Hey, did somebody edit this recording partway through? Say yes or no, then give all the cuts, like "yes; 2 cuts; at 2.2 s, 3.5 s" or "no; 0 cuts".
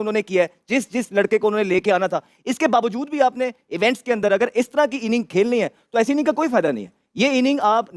no; 0 cuts